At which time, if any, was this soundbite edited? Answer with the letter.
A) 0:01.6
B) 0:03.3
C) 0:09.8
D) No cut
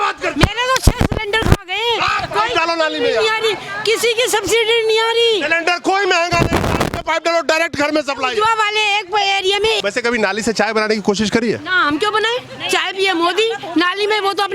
C